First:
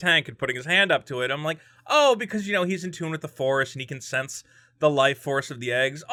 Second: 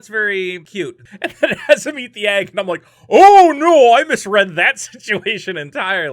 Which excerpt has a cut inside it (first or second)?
second